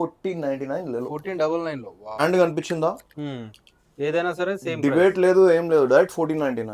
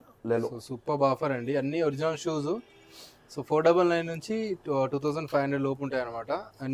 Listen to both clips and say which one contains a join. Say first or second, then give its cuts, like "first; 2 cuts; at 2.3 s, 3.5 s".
first; 1 cut; at 2.2 s